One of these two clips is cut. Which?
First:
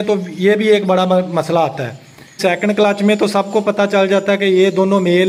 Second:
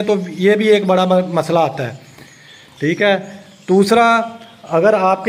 first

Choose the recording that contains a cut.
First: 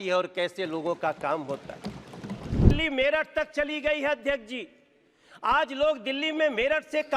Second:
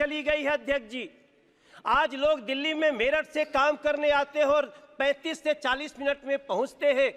first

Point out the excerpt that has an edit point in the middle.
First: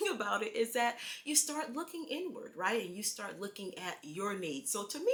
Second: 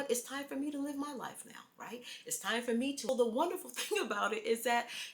second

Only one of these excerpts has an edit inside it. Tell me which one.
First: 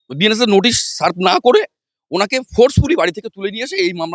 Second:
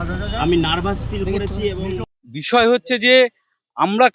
second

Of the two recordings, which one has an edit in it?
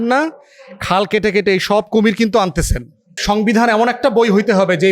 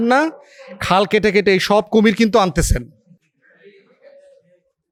first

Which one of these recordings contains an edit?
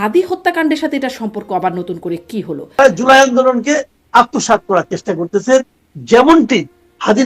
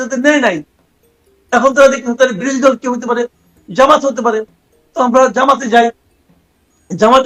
first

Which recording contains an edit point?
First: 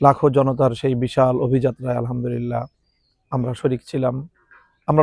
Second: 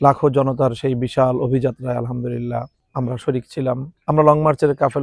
second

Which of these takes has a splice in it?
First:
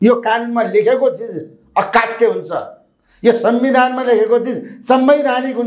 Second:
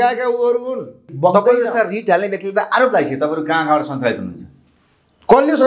second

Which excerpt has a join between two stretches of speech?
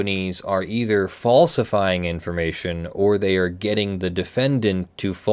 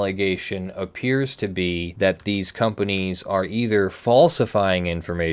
second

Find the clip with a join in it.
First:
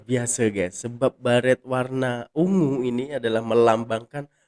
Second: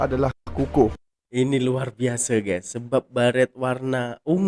second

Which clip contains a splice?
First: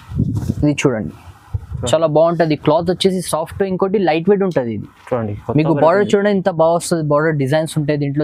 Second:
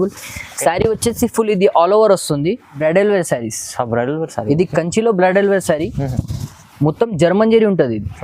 second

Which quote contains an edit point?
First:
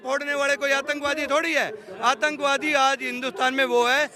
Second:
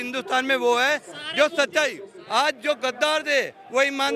second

